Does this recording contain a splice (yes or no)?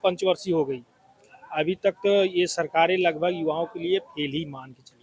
no